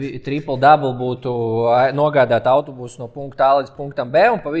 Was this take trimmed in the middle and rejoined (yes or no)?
no